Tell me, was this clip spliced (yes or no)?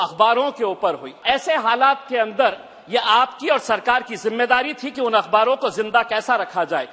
yes